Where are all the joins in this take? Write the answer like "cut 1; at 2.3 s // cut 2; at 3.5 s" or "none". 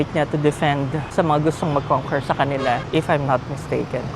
cut 1; at 1.1 s // cut 2; at 2.8 s